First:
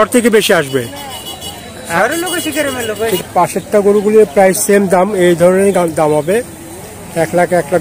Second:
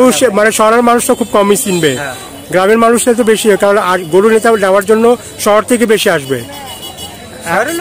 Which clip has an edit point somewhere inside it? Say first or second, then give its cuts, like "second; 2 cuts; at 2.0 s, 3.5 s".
first; 1 cut; at 3.2 s